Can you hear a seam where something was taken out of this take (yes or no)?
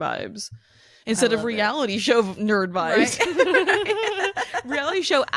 no